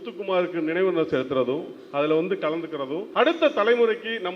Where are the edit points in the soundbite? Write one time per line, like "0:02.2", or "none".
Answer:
0:03.0